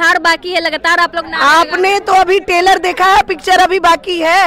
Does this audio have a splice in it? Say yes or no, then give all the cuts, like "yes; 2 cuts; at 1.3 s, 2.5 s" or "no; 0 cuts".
no; 0 cuts